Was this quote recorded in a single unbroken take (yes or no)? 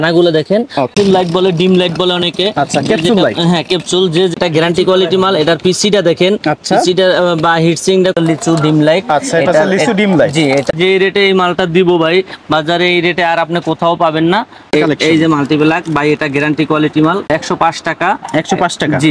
no